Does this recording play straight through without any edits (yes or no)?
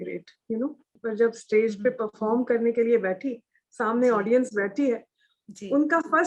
no